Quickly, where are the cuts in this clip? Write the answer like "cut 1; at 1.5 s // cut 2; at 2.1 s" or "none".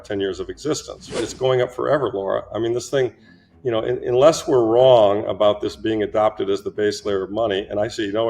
cut 1; at 1.2 s